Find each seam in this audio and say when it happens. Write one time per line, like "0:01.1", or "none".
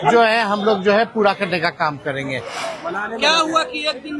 0:02.7